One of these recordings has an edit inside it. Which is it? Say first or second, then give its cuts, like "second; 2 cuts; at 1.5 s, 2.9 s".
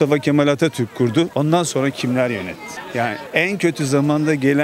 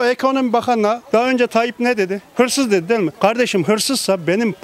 second; 2 cuts; at 1.0 s, 2.3 s